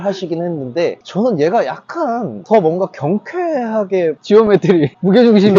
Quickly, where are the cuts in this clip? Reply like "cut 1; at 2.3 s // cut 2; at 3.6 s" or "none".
cut 1; at 4.2 s